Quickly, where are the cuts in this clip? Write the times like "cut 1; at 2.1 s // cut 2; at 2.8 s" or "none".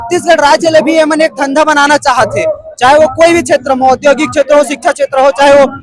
none